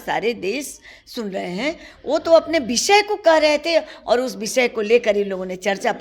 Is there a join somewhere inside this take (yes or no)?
no